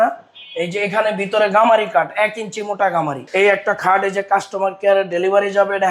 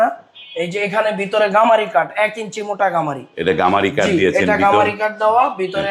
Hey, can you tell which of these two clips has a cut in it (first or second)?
first